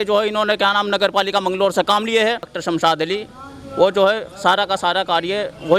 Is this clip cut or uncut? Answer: cut